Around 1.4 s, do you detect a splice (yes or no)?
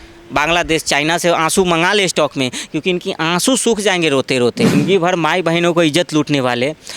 no